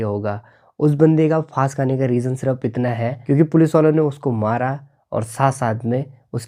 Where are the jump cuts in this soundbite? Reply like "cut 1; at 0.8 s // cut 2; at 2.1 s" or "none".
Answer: none